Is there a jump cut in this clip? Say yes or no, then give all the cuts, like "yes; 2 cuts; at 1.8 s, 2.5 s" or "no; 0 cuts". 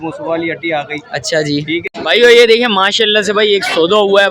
yes; 1 cut; at 1.9 s